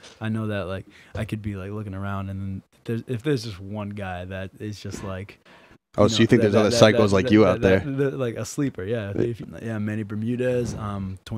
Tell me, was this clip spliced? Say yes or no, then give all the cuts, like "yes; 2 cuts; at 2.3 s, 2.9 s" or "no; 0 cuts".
yes; 1 cut; at 9.4 s